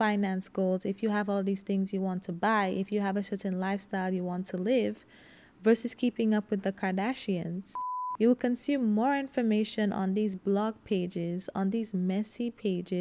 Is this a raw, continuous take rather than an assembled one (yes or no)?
no